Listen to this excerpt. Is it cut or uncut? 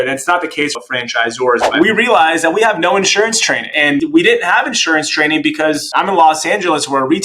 cut